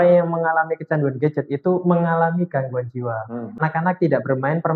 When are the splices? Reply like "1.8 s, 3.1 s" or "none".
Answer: 3.6 s